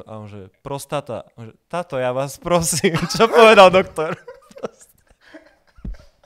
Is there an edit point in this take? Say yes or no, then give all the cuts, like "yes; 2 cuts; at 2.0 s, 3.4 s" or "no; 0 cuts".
no; 0 cuts